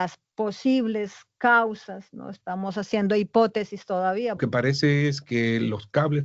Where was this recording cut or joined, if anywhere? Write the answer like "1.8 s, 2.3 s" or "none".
4.4 s